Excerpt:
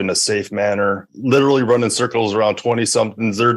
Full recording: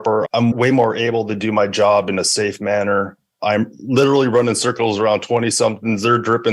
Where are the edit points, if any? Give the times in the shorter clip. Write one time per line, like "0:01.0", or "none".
0:01.1